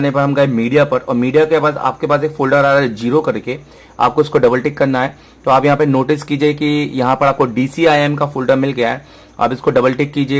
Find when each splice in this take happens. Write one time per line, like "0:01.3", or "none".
none

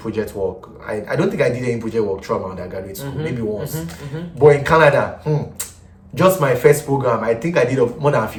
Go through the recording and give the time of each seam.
none

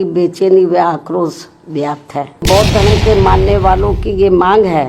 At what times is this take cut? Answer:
0:02.4

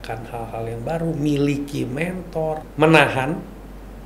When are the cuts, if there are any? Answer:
0:02.6

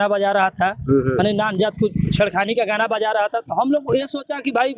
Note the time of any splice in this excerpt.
none

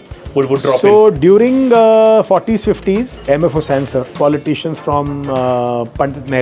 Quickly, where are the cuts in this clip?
0:03.1
0:04.1

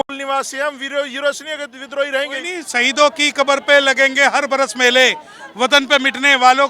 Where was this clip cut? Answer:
0:02.6

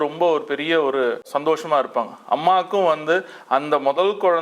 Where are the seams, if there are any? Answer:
0:01.3

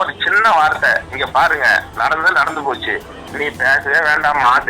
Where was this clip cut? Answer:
0:03.2

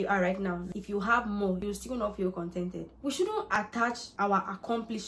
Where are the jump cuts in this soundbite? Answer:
0:03.0

